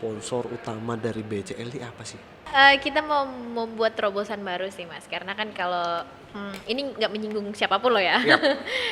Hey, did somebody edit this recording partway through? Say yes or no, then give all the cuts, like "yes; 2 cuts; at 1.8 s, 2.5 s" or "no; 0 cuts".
yes; 1 cut; at 2.4 s